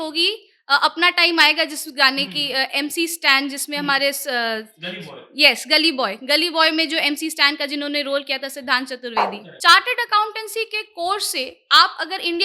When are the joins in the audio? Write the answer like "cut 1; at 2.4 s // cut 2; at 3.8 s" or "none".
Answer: cut 1; at 9.5 s